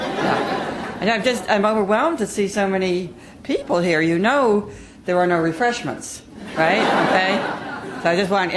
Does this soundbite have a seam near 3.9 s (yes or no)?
yes